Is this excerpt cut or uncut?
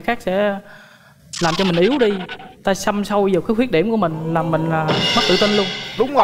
uncut